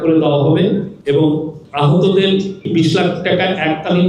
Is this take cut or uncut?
cut